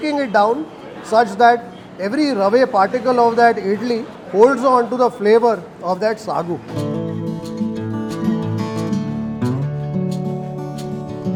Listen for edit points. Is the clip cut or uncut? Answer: uncut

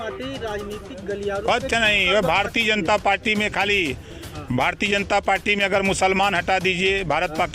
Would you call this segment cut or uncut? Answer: uncut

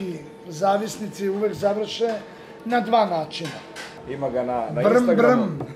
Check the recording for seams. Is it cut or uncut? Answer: cut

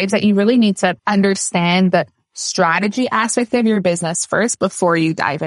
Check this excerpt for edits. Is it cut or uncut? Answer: uncut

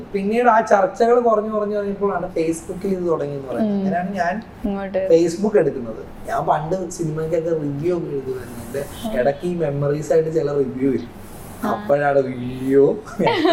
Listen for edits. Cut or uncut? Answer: uncut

